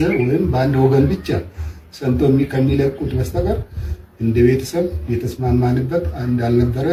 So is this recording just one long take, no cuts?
yes; 0 cuts

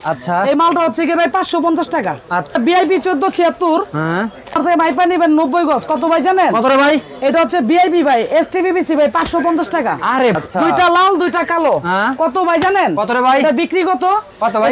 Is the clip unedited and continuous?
no; 3 cuts; at 2.6 s, 4.6 s, 10.4 s

